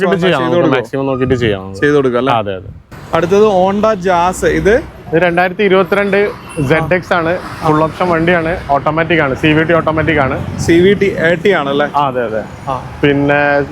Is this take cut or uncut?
cut